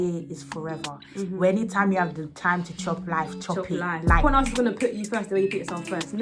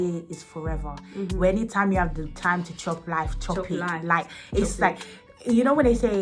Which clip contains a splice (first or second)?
first